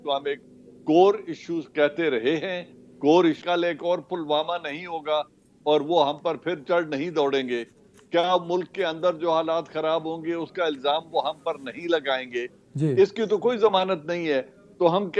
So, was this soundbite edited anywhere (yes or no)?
yes